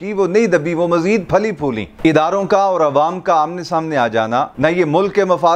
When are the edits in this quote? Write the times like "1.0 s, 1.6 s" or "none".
1.9 s, 4.5 s